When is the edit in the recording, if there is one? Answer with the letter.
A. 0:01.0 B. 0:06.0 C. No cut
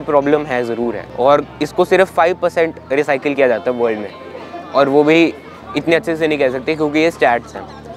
A